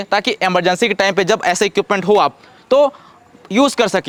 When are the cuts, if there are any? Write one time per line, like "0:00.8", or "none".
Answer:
none